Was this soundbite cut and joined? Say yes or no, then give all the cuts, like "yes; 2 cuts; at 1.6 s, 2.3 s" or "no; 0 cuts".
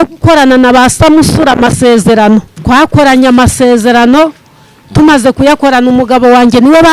yes; 1 cut; at 2.5 s